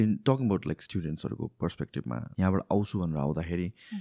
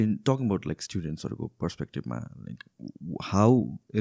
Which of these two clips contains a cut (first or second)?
first